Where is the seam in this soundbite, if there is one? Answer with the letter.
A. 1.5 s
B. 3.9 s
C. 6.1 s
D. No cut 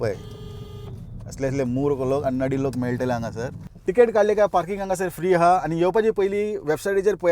B